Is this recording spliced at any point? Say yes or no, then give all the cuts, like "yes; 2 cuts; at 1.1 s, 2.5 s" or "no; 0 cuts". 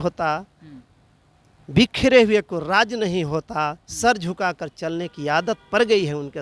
no; 0 cuts